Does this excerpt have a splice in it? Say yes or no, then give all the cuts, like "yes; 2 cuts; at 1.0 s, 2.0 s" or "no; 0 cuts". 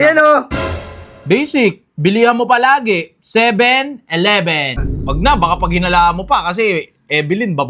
yes; 1 cut; at 4.8 s